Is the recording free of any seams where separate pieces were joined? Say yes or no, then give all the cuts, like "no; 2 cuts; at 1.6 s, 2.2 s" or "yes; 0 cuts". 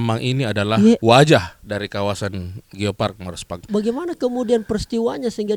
no; 2 cuts; at 1.0 s, 3.6 s